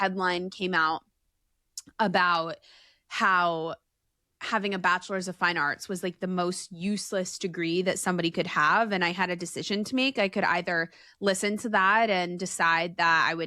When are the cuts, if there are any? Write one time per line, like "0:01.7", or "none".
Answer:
none